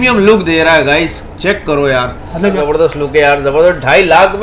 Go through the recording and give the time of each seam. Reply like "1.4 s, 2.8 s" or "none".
2.6 s